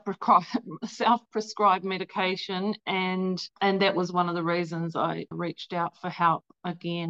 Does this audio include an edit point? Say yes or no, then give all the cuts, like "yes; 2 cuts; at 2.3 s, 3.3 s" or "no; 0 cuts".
yes; 1 cut; at 5.3 s